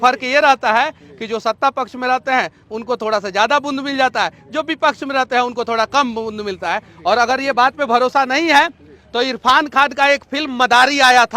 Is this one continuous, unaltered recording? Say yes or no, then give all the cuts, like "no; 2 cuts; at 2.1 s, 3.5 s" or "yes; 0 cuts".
yes; 0 cuts